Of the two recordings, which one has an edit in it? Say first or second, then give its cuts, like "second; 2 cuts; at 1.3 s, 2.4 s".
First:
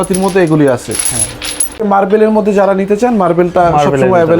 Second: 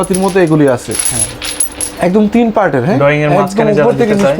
first; 1 cut; at 1.9 s